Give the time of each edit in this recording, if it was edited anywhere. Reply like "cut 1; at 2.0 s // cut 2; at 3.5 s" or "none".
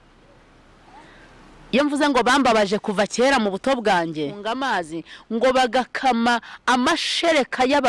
cut 1; at 4.4 s